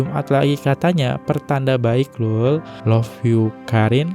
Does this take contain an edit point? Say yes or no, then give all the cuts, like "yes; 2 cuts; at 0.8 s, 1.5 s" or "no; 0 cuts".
yes; 1 cut; at 2.8 s